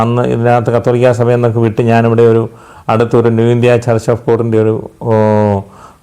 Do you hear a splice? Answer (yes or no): no